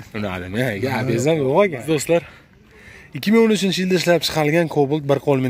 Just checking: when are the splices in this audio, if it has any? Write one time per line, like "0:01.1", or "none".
0:01.8